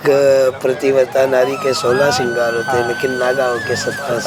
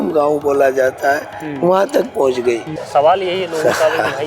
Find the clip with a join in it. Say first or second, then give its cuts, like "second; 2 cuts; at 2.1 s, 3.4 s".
second; 1 cut; at 2.8 s